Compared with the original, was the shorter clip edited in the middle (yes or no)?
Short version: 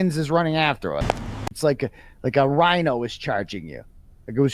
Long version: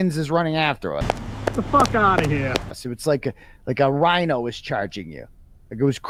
yes